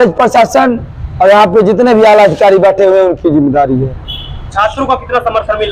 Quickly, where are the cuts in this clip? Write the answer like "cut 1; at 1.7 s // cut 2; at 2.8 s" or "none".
none